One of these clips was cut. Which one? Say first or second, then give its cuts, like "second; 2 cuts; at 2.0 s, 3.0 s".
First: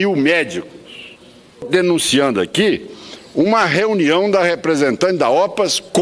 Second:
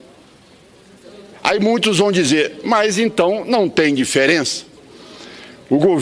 first; 1 cut; at 1.7 s